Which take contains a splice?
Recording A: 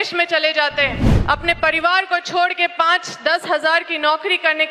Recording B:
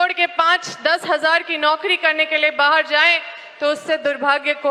A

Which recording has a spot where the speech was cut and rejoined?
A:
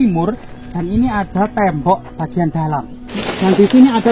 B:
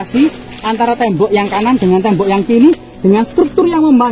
A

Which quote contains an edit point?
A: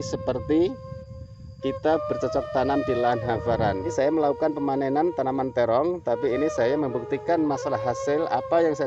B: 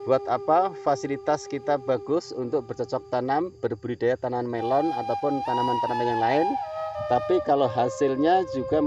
A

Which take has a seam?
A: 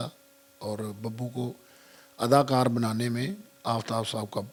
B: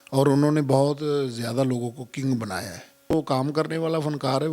B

